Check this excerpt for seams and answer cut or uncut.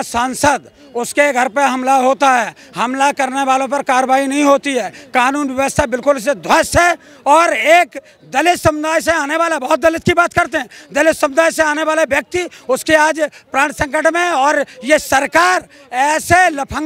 uncut